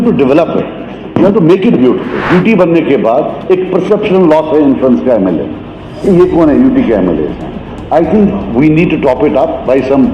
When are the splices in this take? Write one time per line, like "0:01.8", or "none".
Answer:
0:02.2